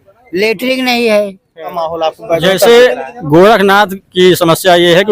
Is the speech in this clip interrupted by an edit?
yes; 1 cut; at 1.7 s

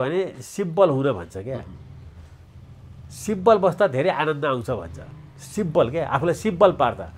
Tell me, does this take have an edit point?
no; 0 cuts

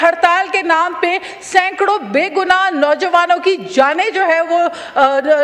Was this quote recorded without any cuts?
yes; 0 cuts

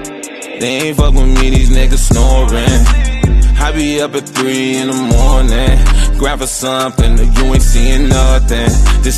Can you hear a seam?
no; 0 cuts

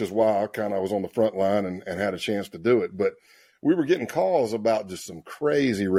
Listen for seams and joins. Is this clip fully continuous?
yes; 0 cuts

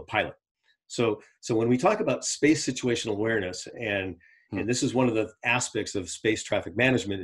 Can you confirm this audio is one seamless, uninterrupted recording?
yes; 0 cuts

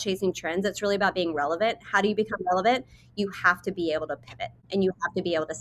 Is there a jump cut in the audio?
yes; 1 cut; at 4.6 s

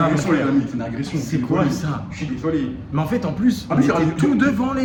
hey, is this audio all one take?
yes; 0 cuts

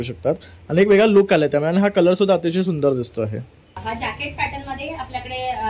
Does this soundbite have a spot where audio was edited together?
yes; 1 cut; at 3.8 s

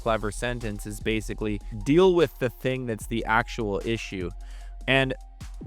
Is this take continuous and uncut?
yes; 0 cuts

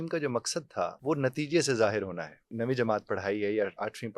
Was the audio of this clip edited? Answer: yes; 2 cuts; at 1.0 s, 2.5 s

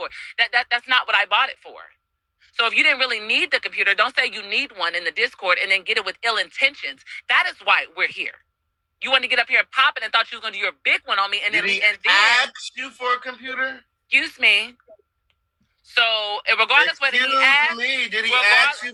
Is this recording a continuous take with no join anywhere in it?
yes; 0 cuts

